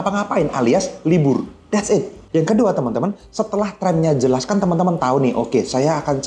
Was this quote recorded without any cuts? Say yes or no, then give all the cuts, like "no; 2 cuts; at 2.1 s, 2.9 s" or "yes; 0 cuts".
no; 1 cut; at 2.2 s